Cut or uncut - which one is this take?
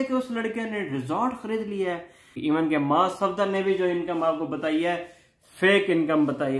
cut